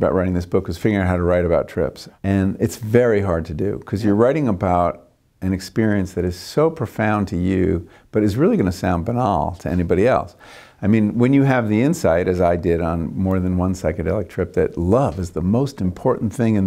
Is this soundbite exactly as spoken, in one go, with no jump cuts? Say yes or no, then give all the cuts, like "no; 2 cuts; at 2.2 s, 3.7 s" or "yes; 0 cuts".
no; 1 cut; at 2.1 s